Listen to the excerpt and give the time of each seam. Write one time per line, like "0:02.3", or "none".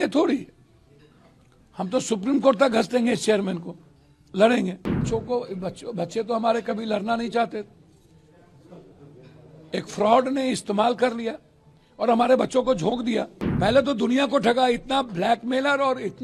0:05.0
0:13.4